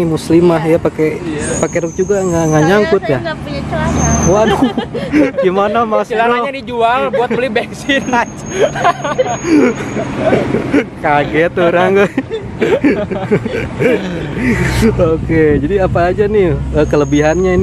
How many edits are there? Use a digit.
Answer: 0